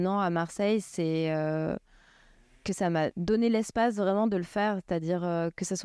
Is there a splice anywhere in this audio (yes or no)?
yes